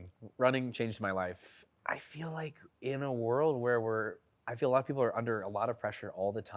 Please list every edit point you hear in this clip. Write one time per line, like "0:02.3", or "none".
0:01.6